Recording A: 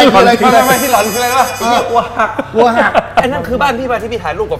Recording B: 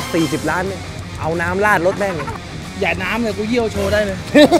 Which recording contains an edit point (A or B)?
A